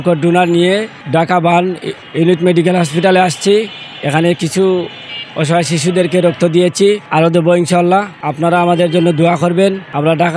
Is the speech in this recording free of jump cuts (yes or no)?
yes